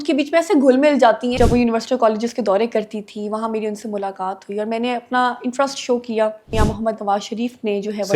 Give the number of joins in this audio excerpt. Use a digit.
2